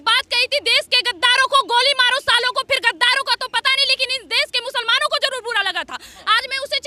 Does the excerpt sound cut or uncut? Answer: uncut